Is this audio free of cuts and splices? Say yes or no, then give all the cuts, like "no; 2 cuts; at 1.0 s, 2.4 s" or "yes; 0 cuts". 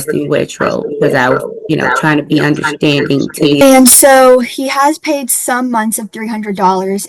no; 1 cut; at 3.6 s